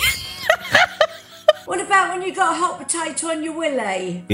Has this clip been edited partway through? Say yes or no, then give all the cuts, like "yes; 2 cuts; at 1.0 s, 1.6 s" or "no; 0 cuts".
yes; 1 cut; at 1.7 s